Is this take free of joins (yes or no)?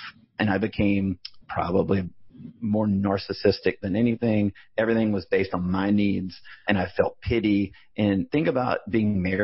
yes